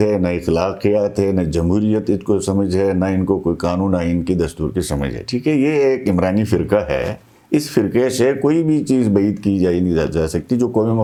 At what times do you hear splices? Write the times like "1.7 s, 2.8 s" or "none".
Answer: none